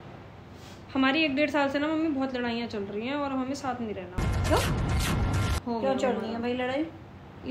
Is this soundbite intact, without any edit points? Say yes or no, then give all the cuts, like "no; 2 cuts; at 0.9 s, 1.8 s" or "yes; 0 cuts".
yes; 0 cuts